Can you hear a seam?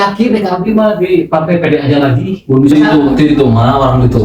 yes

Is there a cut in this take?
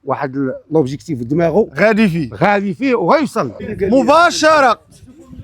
yes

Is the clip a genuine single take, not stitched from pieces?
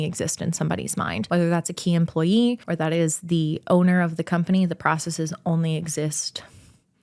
no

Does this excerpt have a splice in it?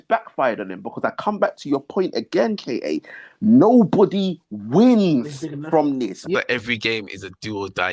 yes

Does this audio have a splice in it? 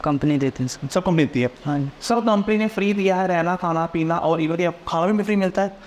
no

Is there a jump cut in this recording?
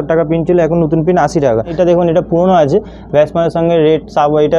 yes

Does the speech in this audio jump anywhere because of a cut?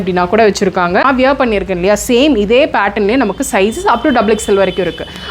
yes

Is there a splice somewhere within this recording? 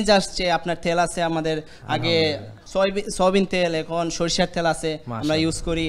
no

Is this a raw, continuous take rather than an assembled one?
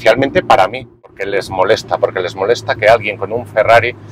no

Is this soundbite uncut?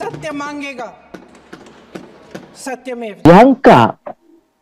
no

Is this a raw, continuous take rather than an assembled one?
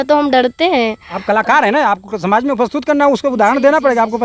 yes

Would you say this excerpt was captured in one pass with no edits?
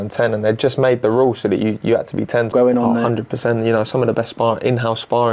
no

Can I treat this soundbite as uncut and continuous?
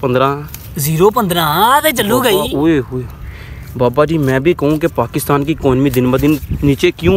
yes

